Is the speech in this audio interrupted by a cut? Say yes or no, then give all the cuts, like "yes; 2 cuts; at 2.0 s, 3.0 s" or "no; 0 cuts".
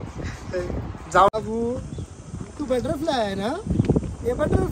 yes; 1 cut; at 1.3 s